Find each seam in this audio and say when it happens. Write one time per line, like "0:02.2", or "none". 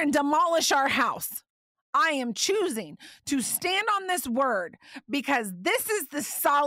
none